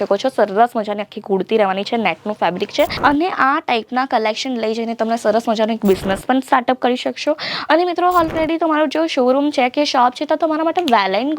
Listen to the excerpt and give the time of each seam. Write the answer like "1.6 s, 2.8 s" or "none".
2.9 s